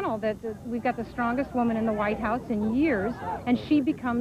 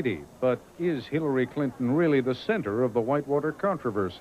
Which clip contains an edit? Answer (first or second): first